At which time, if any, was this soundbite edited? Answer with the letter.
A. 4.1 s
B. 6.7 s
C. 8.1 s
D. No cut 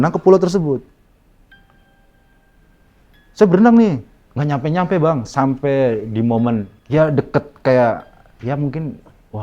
D